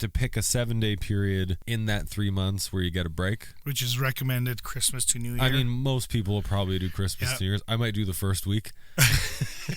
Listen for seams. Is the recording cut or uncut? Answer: cut